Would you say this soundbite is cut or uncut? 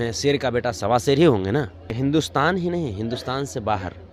cut